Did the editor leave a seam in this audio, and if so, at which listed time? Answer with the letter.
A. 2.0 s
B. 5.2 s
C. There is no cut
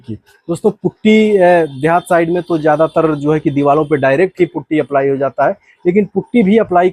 C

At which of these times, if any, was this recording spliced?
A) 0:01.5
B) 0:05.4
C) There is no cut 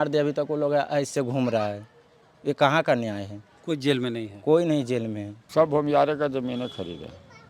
B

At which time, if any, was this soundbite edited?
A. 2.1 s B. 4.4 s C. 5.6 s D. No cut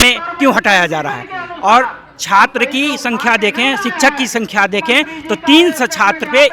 D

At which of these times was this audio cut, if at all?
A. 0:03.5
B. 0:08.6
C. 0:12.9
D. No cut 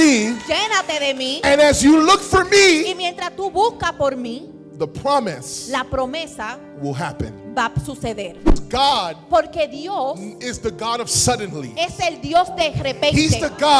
B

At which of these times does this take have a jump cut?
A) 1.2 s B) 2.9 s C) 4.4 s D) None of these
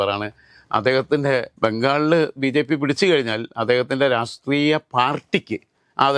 D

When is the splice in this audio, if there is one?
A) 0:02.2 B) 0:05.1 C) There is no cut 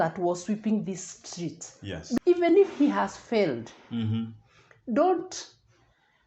A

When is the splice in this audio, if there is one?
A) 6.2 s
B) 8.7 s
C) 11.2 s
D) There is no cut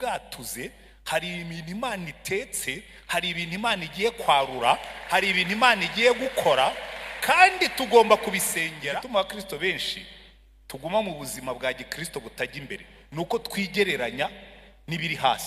B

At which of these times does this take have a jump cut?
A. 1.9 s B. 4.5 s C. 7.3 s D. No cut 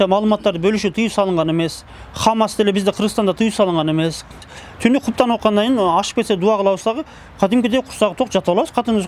B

